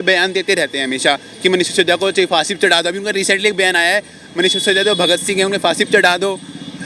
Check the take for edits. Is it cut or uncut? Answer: uncut